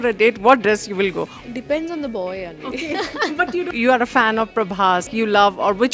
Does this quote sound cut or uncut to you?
cut